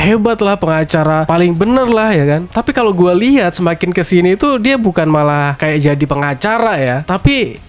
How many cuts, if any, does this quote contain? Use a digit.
1